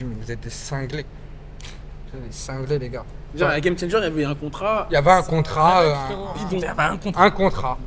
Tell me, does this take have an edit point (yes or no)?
no